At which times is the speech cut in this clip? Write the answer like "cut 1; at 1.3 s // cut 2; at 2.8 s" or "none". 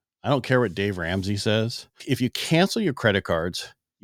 cut 1; at 1.9 s